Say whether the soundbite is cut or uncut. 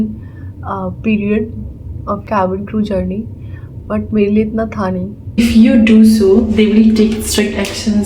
cut